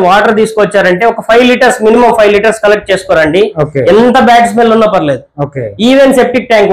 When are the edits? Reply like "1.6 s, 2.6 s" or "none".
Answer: none